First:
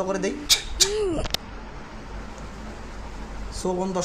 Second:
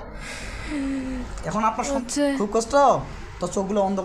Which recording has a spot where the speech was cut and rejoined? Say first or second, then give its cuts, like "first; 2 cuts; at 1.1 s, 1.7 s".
second; 1 cut; at 1.9 s